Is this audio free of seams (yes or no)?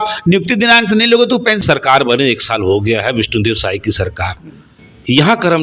no